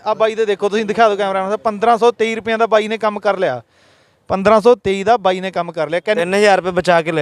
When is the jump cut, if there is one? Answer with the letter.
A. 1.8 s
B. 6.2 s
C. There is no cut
B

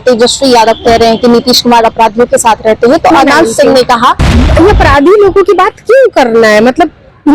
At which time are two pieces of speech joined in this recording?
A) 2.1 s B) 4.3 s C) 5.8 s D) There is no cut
B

